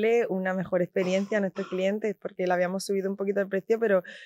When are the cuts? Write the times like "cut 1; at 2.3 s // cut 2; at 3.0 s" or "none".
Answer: none